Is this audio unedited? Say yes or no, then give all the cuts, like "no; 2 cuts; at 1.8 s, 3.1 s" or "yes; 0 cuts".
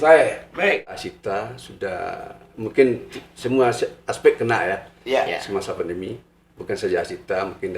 no; 1 cut; at 1.1 s